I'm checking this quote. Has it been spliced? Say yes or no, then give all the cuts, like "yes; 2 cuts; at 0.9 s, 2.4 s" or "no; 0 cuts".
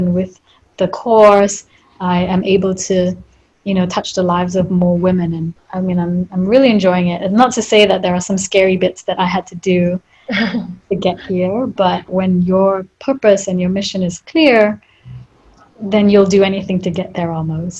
yes; 2 cuts; at 5.6 s, 12.1 s